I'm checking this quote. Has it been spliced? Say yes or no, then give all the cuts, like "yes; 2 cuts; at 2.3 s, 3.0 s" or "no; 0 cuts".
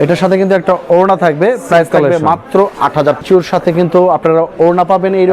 yes; 1 cut; at 3.2 s